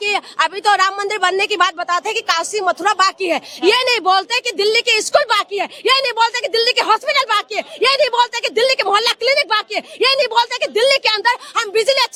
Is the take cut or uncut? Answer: uncut